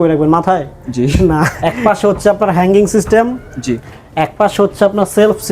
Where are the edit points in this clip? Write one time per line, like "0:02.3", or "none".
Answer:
0:01.5